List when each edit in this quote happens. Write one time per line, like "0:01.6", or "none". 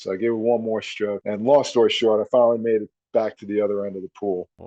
0:01.2